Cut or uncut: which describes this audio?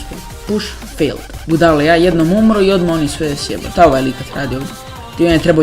cut